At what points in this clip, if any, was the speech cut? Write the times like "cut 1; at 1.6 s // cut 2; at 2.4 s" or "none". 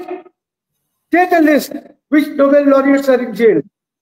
none